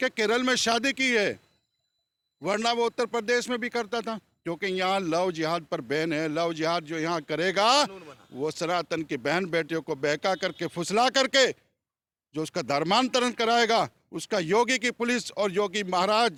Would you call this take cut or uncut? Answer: uncut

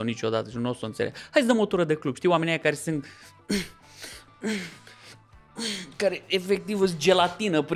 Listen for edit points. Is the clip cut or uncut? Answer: uncut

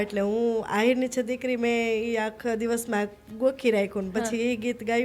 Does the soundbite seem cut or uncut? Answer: uncut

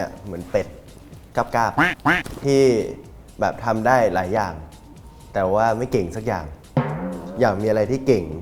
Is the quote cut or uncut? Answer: uncut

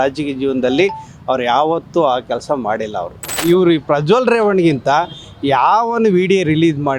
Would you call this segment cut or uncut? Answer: cut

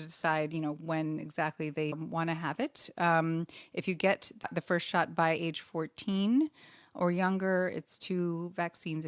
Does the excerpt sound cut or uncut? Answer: cut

